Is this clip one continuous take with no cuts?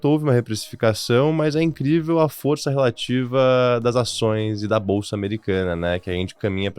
yes; 0 cuts

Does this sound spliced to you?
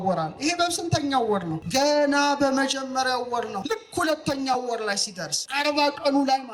yes; 3 cuts; at 1.6 s, 3.6 s, 5.3 s

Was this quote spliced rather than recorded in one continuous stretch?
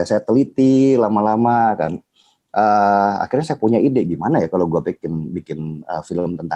no; 0 cuts

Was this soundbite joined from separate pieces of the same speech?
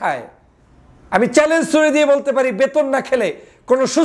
no; 0 cuts

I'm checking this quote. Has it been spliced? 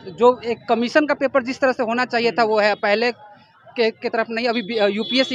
no; 0 cuts

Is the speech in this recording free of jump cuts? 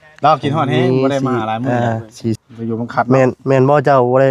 no; 1 cut; at 2.4 s

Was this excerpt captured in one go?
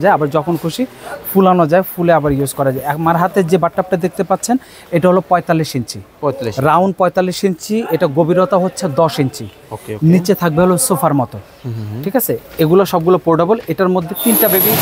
yes; 0 cuts

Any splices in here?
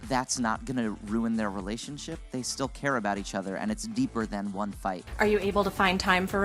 yes; 1 cut; at 5.0 s

